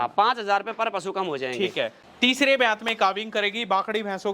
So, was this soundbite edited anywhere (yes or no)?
yes